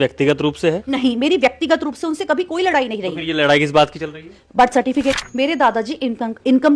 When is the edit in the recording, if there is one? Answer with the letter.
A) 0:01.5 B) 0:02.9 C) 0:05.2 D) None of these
C